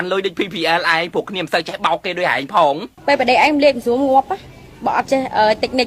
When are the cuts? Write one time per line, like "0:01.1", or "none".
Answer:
0:02.5